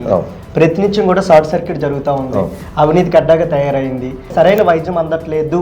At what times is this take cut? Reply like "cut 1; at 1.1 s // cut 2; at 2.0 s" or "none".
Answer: cut 1; at 4.3 s